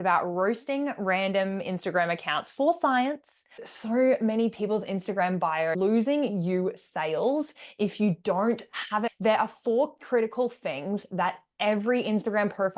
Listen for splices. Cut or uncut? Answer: cut